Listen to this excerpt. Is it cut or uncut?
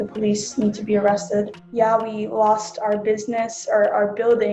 cut